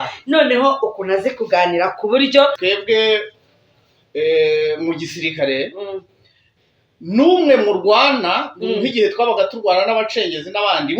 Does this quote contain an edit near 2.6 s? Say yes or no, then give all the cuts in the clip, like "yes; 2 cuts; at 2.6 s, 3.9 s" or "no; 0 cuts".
yes; 1 cut; at 2.6 s